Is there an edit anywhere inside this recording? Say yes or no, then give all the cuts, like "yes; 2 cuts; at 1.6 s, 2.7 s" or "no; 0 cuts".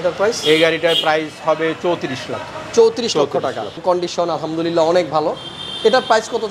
yes; 1 cut; at 3.8 s